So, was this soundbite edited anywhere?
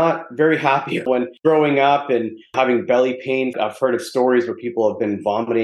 yes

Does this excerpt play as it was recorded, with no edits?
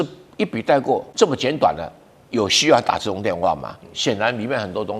no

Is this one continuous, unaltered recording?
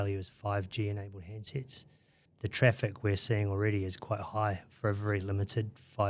no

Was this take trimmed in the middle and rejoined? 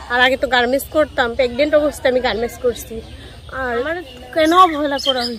yes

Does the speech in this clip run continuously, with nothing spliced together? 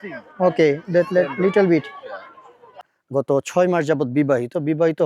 no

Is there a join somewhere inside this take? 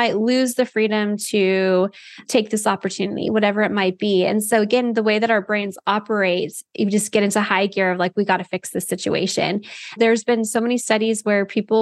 yes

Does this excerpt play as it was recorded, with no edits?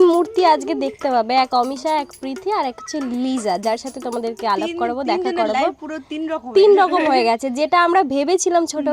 yes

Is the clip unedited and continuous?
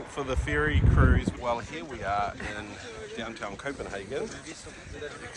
no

